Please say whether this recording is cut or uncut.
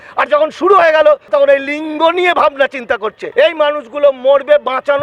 cut